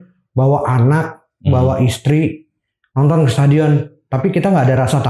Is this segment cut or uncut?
uncut